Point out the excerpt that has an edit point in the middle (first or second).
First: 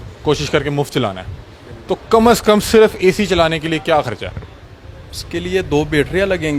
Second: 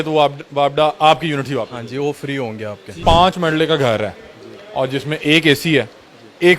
second